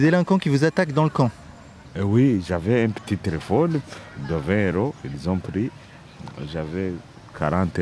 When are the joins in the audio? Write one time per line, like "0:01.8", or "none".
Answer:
none